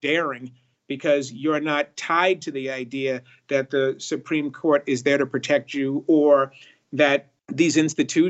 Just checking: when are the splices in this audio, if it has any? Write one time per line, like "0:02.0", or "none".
0:07.4

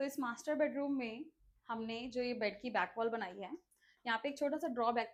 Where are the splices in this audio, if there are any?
none

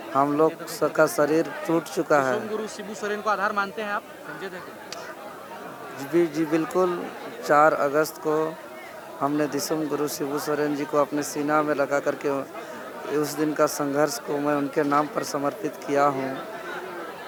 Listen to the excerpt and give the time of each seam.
none

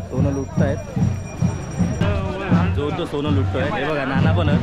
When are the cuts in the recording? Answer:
0:02.0

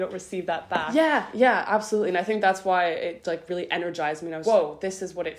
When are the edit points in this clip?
0:00.9
0:04.4

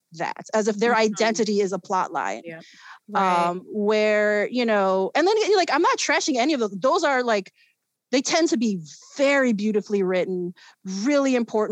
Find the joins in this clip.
none

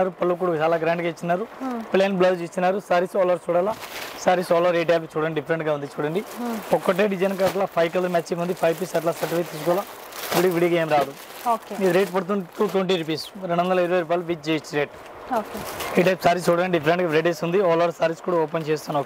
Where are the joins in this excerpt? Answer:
none

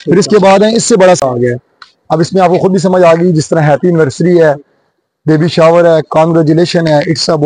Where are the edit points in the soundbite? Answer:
0:01.2

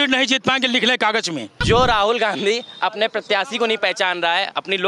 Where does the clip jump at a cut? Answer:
0:01.5

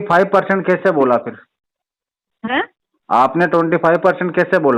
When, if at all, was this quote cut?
none

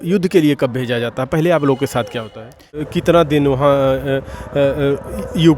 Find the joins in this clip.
0:02.8

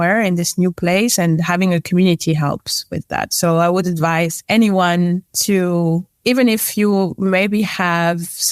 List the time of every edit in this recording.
0:04.4
0:05.3
0:06.1

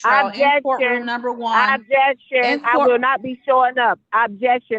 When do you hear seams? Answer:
none

